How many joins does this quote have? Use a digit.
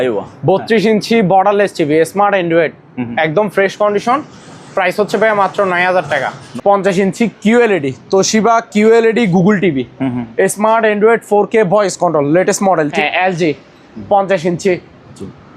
2